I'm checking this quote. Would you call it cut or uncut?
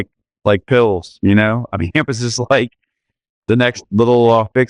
cut